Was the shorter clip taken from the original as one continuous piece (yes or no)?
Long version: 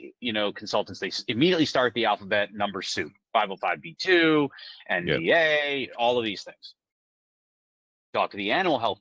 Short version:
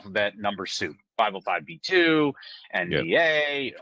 yes